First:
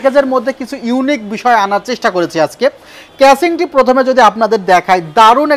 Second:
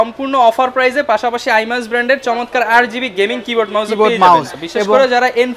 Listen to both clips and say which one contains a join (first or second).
second